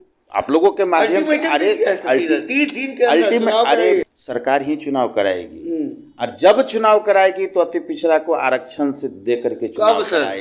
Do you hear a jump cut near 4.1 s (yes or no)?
yes